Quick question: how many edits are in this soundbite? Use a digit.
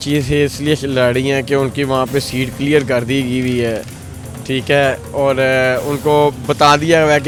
0